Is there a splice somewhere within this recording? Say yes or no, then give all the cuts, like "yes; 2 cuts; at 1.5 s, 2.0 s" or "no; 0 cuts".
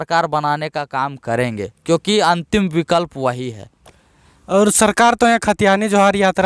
no; 0 cuts